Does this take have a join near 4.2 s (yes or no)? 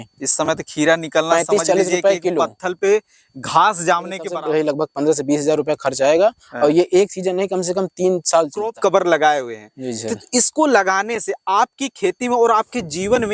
yes